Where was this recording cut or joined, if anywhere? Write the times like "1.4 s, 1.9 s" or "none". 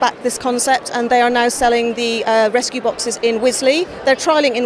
none

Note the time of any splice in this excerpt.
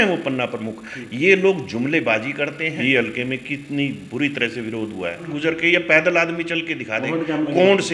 2.8 s, 5.2 s

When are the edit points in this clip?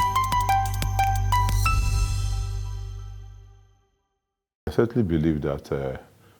4.7 s

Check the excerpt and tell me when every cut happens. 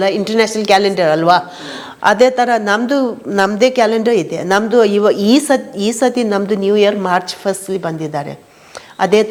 none

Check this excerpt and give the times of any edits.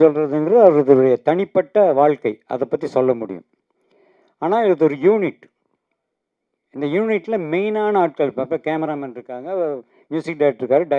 none

